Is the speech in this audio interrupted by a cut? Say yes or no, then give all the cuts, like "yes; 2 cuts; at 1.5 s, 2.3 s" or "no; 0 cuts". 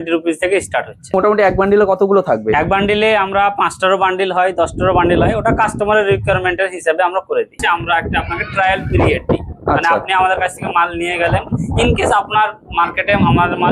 yes; 2 cuts; at 1.1 s, 7.6 s